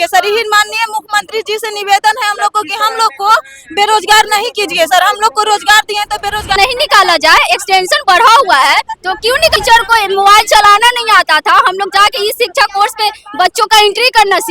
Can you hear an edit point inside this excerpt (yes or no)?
yes